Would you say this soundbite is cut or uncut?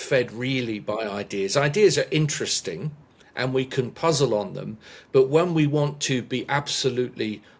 uncut